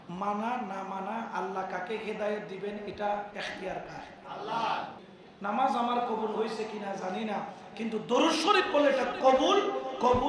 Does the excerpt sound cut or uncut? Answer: cut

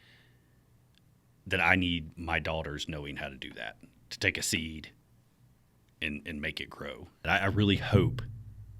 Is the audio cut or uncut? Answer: cut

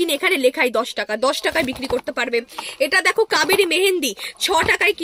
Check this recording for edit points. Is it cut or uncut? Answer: uncut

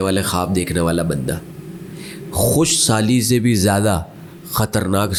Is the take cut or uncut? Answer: uncut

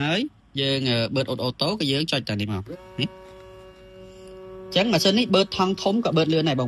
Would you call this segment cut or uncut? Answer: uncut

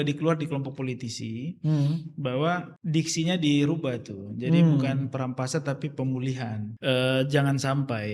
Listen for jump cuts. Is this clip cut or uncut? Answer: cut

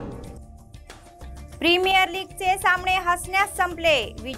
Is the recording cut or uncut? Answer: cut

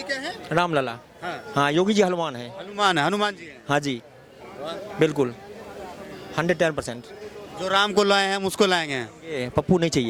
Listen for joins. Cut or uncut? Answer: uncut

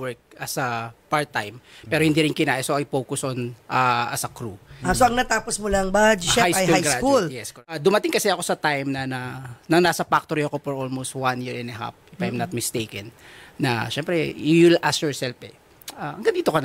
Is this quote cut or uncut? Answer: cut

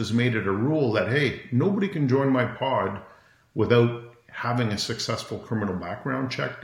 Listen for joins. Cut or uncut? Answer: uncut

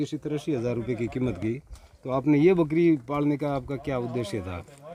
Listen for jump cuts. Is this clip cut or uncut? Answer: uncut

